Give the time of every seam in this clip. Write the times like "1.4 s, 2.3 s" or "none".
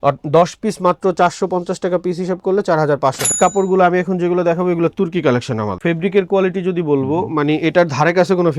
3.3 s, 5.8 s

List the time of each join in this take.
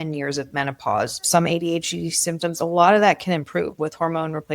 1.2 s

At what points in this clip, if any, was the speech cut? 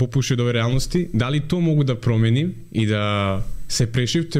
none

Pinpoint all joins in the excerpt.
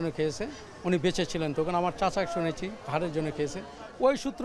none

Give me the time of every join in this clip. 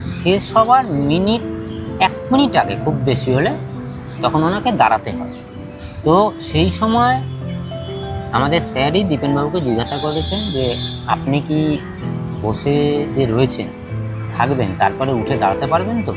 none

